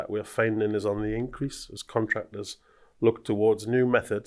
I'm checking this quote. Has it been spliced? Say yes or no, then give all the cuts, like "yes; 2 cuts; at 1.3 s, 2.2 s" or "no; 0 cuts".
no; 0 cuts